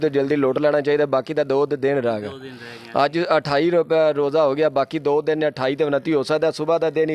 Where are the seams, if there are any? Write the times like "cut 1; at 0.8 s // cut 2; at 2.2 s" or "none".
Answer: none